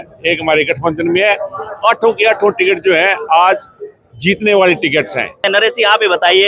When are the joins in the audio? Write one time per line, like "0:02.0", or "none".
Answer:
0:05.4

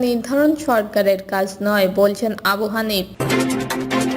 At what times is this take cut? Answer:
0:03.1

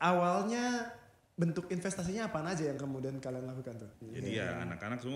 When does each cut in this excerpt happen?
0:04.0

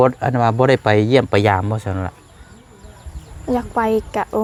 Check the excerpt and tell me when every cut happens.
none

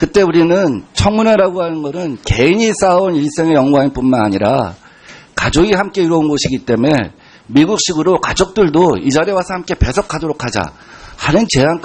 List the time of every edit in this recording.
0:06.8

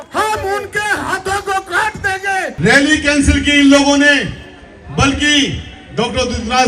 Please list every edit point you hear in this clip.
0:02.5

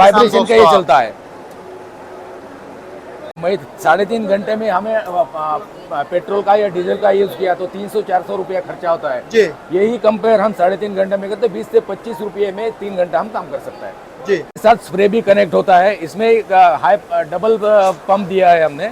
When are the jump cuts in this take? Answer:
0:03.3
0:14.5

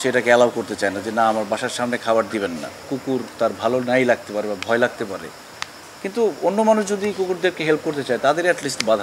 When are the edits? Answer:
0:02.9

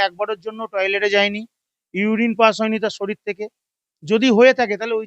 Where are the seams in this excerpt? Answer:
none

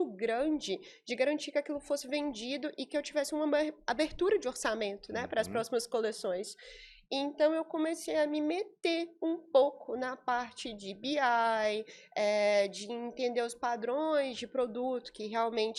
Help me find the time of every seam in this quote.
none

